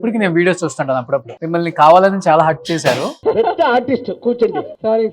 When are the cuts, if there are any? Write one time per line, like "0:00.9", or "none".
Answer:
0:01.3
0:03.1